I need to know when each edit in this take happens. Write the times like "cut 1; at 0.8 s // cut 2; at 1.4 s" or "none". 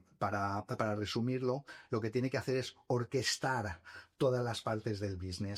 none